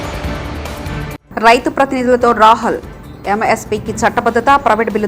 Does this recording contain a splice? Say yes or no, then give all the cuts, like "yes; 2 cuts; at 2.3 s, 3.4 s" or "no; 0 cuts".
yes; 1 cut; at 1.2 s